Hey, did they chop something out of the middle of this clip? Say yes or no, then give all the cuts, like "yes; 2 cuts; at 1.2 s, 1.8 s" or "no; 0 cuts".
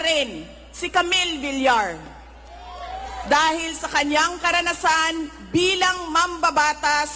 no; 0 cuts